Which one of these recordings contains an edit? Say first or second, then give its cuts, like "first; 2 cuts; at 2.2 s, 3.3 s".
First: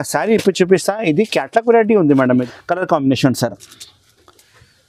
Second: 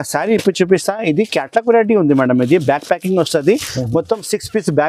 first; 1 cut; at 2.4 s